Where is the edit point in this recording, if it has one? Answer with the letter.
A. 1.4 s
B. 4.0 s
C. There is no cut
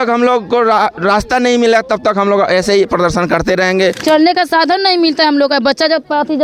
B